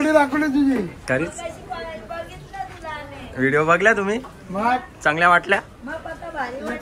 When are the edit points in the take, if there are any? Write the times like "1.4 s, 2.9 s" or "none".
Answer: none

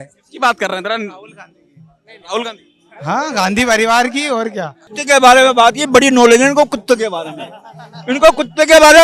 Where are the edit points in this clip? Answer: 4.9 s

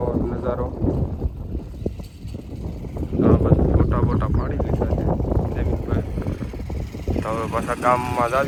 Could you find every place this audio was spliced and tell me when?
none

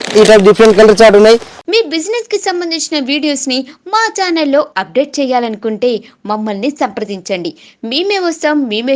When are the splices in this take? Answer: 1.6 s

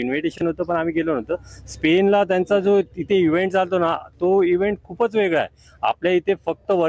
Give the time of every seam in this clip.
none

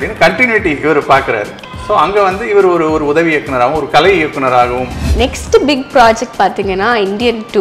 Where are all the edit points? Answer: 5.1 s

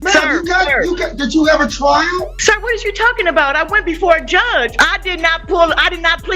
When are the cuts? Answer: 2.3 s, 4.7 s

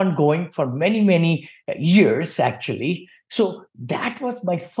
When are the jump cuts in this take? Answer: 3.1 s

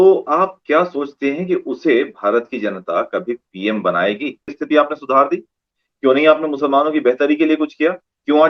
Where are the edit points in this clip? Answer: 4.6 s

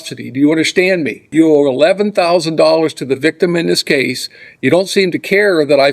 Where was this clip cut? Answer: 1.2 s

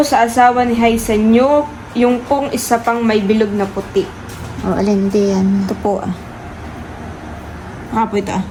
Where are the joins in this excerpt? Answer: none

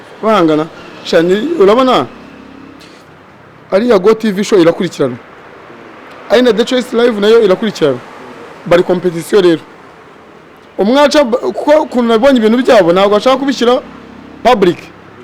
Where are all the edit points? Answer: none

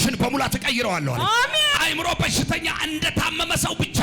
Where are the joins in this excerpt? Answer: 1.7 s

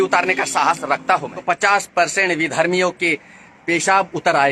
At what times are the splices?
1.3 s

